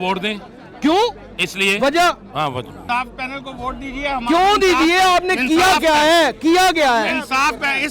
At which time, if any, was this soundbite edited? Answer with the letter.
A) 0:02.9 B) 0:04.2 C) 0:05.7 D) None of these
A